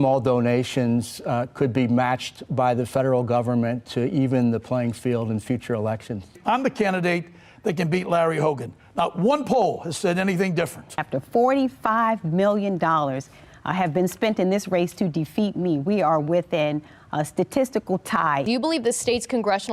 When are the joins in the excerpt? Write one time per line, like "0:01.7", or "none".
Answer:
0:06.4
0:11.0
0:18.4